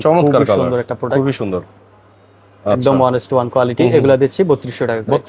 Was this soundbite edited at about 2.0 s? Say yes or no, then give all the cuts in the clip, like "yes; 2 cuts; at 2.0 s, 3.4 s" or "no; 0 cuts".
no; 0 cuts